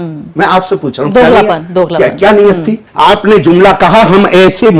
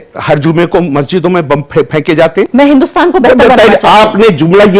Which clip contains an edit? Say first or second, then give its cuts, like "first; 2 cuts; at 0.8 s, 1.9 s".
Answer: first; 1 cut; at 2.8 s